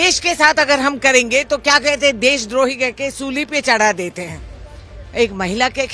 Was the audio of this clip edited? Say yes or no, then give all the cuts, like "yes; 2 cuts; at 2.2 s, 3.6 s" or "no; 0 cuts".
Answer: no; 0 cuts